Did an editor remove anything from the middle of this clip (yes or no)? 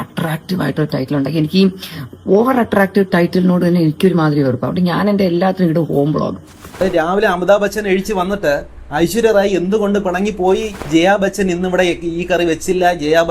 yes